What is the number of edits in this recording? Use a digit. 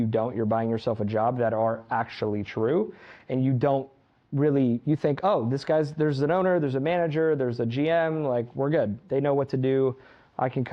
0